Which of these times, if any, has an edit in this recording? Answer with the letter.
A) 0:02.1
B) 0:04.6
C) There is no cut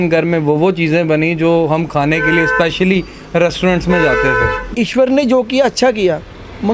B